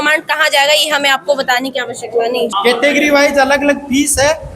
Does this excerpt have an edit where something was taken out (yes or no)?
yes